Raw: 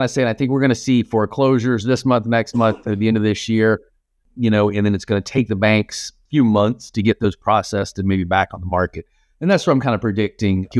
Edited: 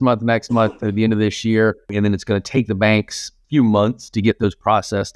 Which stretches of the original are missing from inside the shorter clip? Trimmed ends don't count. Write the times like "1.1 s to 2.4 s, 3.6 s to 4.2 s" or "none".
4.0 s to 4.7 s